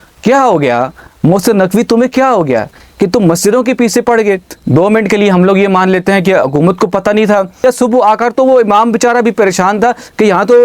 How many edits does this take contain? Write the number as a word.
two